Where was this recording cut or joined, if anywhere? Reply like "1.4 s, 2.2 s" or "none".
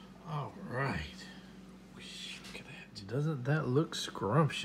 2.9 s